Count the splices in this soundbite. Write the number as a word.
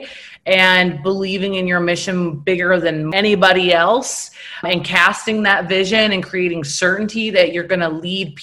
two